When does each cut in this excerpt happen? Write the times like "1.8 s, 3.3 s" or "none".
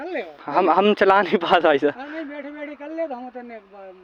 none